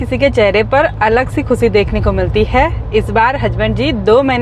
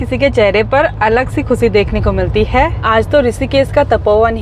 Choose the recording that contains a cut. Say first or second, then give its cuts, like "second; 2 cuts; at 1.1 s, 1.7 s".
second; 1 cut; at 2.8 s